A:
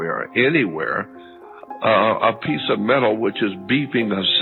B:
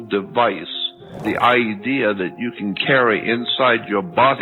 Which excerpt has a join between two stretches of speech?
B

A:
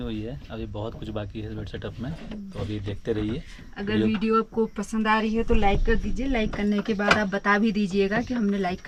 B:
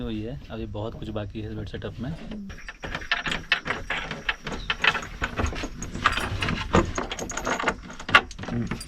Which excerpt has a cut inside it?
B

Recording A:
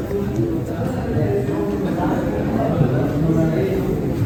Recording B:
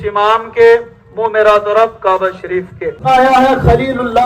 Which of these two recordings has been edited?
B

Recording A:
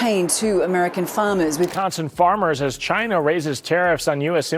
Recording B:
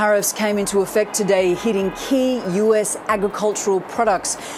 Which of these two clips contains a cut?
A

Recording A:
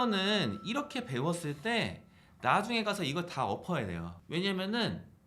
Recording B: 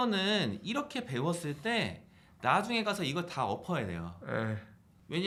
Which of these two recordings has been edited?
A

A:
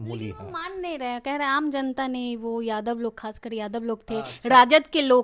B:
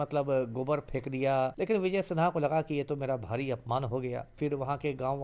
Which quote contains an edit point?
B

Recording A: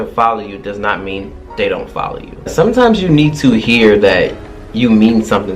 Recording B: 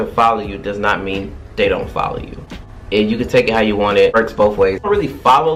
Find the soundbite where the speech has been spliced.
A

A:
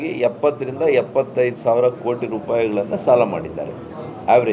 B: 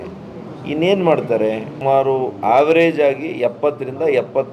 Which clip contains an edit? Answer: B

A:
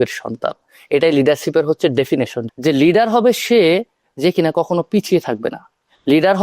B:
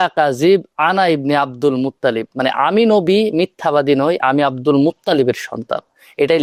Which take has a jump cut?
A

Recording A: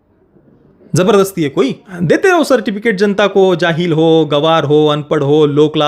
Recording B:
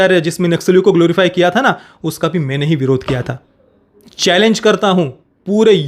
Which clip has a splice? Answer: A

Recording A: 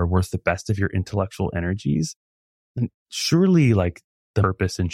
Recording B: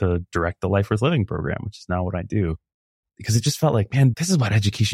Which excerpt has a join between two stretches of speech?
B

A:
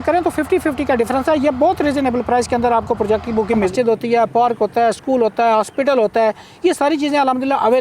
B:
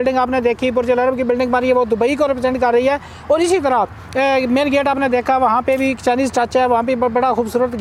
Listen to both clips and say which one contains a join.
A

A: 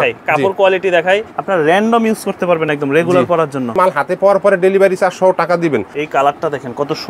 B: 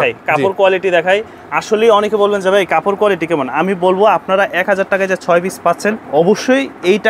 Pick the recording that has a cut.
A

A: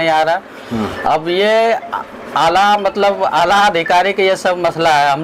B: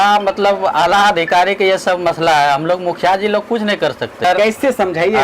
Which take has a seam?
B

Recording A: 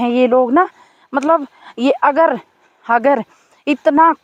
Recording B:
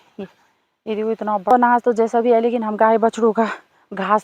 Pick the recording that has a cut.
B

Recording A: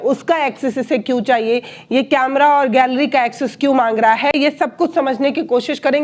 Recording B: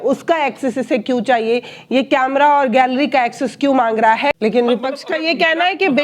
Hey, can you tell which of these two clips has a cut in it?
B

